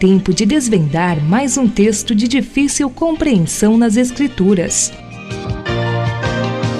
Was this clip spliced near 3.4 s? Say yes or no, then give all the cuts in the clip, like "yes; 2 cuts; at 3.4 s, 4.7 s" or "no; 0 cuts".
no; 1 cut; at 4.8 s